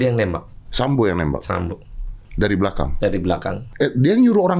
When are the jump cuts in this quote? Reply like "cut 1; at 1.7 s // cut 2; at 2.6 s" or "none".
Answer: cut 1; at 2.3 s // cut 2; at 3.6 s

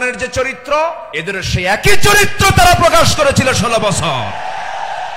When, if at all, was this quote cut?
cut 1; at 1.1 s

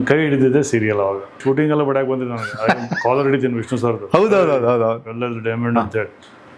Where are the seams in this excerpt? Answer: cut 1; at 1.4 s

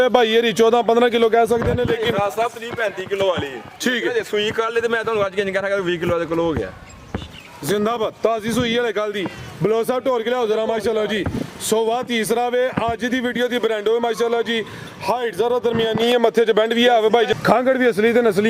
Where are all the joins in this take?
cut 1; at 17.3 s

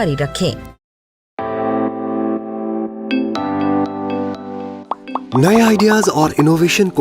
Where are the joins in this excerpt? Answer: cut 1; at 1.2 s

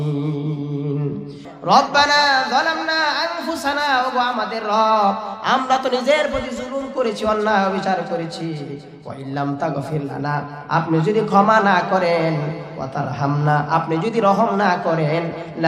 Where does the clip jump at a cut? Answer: cut 1; at 1.4 s

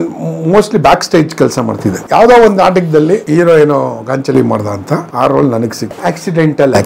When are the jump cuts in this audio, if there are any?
cut 1; at 1.9 s // cut 2; at 3.2 s // cut 3; at 5.1 s // cut 4; at 5.9 s

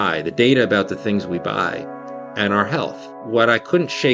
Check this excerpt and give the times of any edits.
cut 1; at 3.1 s

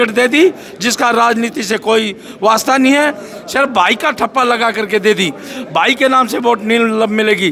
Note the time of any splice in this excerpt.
none

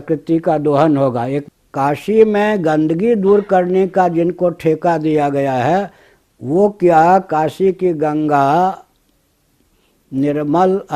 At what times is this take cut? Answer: cut 1; at 1.4 s

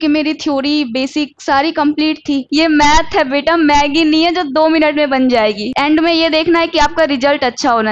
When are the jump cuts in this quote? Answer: cut 1; at 2.5 s // cut 2; at 5.7 s

